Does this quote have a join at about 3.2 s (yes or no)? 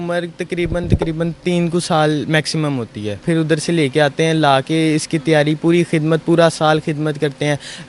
no